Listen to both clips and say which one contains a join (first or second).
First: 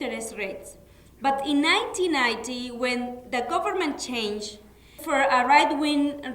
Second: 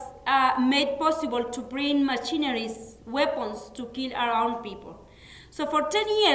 first